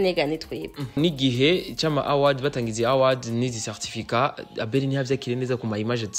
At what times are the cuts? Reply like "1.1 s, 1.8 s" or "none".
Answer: 1.0 s